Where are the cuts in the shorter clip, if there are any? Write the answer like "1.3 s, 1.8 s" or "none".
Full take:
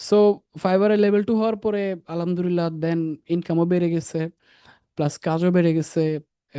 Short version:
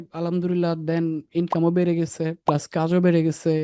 2.4 s